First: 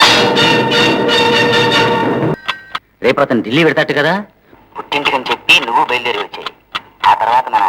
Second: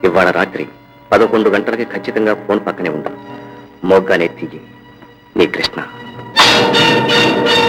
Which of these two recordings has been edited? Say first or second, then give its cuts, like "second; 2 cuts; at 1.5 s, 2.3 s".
first; 1 cut; at 2.3 s